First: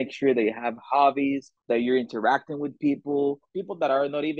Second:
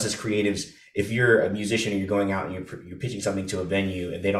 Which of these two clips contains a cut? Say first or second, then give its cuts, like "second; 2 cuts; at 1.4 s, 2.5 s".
first; 2 cuts; at 1.5 s, 3.5 s